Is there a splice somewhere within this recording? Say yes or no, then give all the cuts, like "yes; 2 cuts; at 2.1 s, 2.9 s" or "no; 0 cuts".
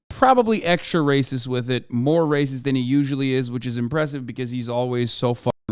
no; 0 cuts